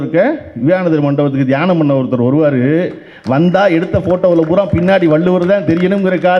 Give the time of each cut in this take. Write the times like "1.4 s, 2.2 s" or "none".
none